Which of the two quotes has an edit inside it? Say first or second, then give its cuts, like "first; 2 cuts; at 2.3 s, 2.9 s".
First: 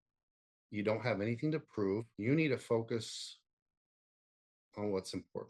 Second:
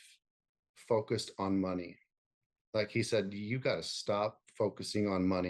first; 1 cut; at 2.1 s